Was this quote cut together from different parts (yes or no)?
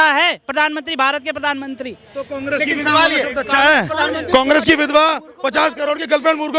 no